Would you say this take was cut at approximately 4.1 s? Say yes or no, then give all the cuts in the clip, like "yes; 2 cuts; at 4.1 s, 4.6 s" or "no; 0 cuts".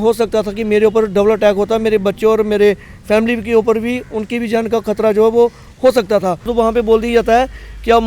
no; 1 cut; at 6.5 s